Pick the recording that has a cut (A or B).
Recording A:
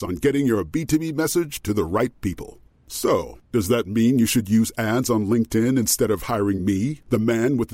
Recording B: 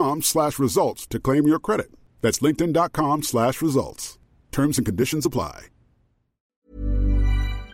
B